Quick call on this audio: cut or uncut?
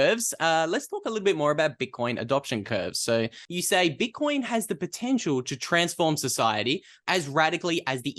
cut